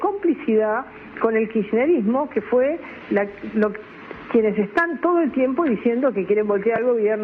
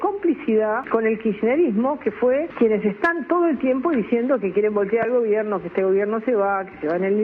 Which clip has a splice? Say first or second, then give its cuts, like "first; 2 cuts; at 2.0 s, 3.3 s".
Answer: second; 2 cuts; at 0.8 s, 2.5 s